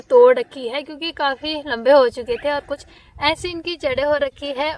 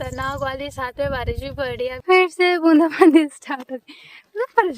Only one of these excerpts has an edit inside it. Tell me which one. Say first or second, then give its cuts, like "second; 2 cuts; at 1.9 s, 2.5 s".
second; 1 cut; at 2.0 s